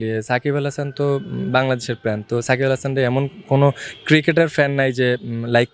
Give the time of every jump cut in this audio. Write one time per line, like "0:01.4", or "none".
none